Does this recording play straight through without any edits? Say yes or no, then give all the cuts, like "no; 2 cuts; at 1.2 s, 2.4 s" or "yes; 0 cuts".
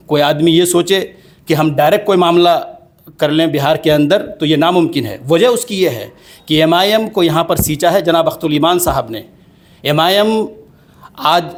yes; 0 cuts